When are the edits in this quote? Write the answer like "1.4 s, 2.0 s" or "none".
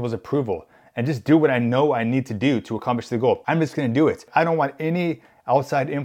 3.4 s, 4.2 s